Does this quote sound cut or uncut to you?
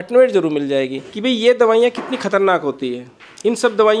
cut